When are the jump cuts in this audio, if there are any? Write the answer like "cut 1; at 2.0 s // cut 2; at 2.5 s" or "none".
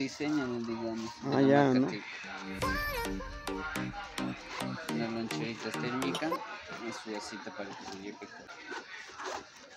cut 1; at 8.5 s

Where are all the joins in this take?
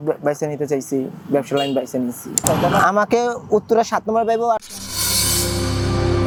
none

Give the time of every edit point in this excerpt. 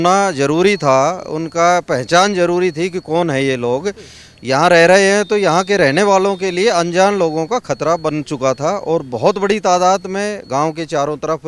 none

